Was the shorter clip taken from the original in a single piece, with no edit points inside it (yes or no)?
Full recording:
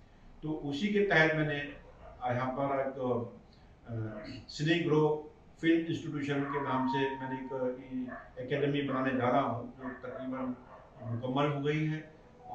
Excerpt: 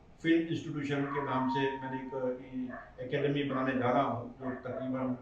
yes